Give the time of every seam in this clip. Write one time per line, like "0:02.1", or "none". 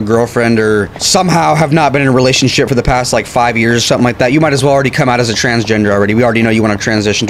0:01.0

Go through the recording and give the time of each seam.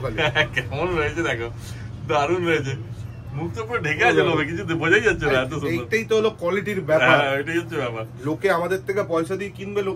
none

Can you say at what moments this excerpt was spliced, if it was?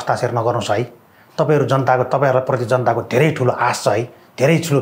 none

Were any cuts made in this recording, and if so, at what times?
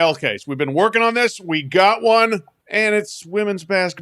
0:02.6

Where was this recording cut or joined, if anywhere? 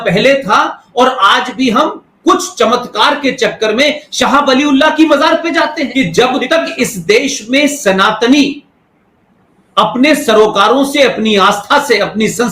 0:05.8

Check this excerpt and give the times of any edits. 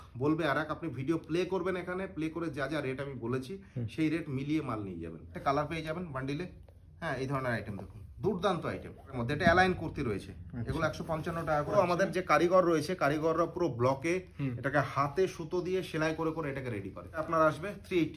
0:05.3
0:09.2
0:11.8
0:17.2

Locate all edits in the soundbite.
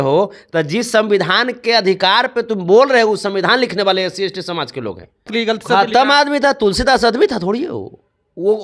0:05.3

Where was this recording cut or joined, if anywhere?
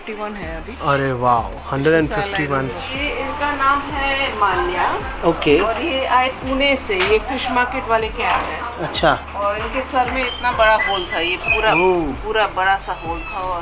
0:02.9

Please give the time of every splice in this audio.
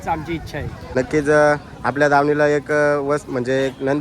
0:01.0

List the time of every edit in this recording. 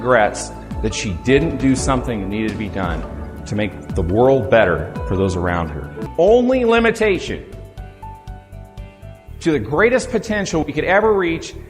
0:06.1

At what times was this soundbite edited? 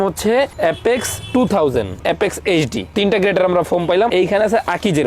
0:02.0
0:04.1

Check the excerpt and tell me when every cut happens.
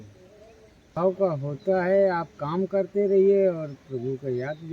0:00.9

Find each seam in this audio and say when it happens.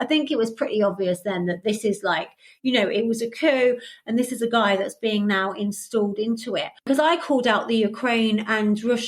0:06.8

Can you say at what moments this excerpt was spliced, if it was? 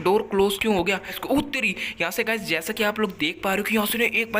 0:01.1

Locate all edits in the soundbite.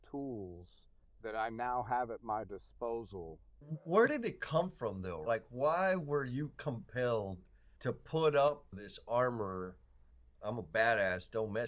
0:03.6

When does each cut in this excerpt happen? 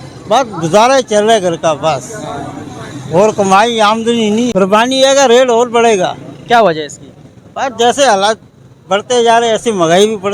0:04.5

